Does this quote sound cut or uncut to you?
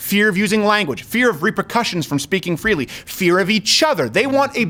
uncut